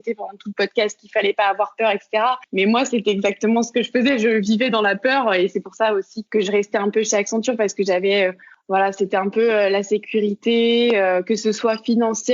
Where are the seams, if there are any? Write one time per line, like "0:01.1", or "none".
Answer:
0:02.4
0:06.2
0:08.5